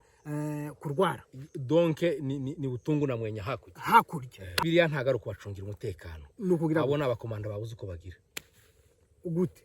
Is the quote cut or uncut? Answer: cut